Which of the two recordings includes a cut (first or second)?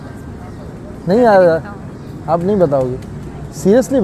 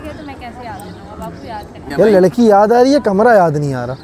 second